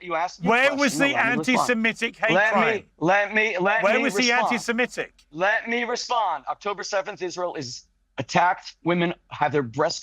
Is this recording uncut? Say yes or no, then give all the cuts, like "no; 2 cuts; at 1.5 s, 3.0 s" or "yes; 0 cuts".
yes; 0 cuts